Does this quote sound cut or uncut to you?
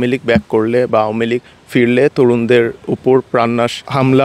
uncut